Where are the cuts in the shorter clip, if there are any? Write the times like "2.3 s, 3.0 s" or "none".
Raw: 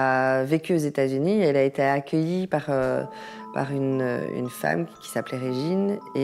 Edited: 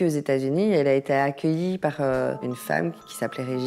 2.4 s